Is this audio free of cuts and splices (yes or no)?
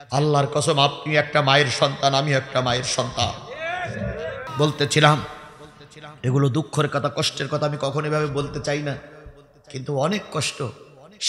no